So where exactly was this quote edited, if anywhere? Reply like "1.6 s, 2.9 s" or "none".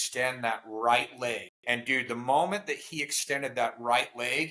1.5 s